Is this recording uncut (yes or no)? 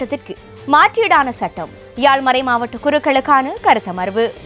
yes